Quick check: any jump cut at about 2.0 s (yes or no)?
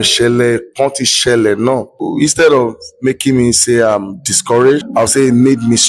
yes